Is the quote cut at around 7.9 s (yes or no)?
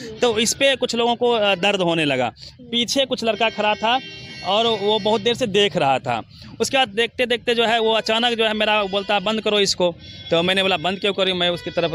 no